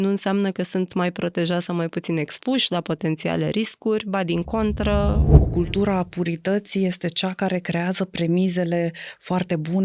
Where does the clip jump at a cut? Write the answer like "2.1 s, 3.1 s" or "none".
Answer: 5.4 s